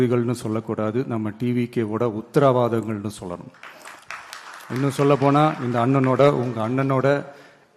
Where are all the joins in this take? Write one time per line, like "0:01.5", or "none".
none

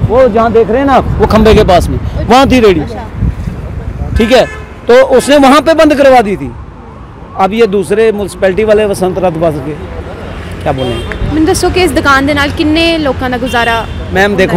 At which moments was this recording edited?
none

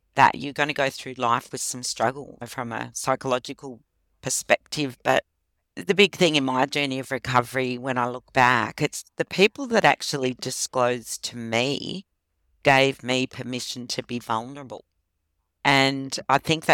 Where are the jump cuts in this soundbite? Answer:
0:02.4
0:05.8

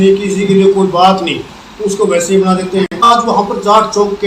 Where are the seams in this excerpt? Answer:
0:03.1

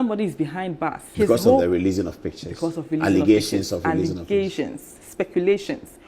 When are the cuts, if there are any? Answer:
0:01.0

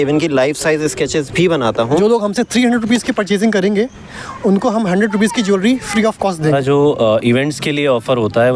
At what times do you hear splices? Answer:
0:02.0
0:06.4

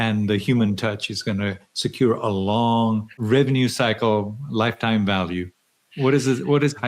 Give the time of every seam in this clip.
0:03.2

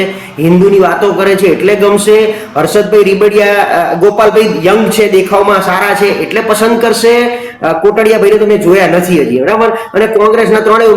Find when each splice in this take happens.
none

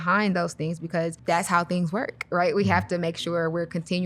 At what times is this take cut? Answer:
0:01.2

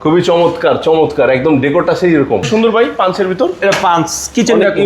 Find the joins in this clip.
0:02.5

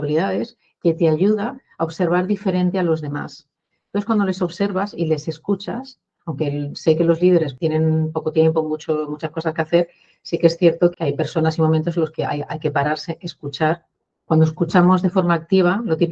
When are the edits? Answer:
0:07.5
0:10.9

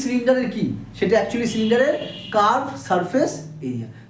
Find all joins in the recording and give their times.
none

